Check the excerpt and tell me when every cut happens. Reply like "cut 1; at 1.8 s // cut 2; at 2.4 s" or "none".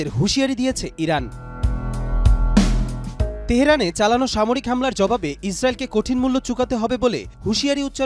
none